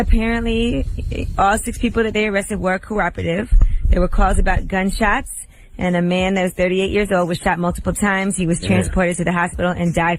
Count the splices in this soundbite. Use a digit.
1